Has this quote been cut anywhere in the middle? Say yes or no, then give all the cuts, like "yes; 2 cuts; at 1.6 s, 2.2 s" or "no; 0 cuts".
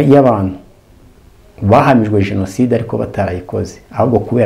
no; 0 cuts